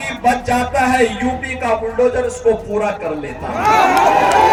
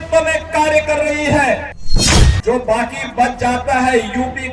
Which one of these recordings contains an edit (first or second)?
second